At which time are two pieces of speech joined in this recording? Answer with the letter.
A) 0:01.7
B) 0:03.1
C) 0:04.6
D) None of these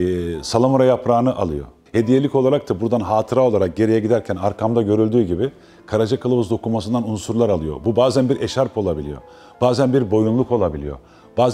A